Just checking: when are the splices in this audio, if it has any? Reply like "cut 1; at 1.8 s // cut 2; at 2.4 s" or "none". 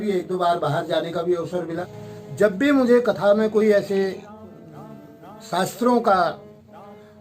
cut 1; at 1.7 s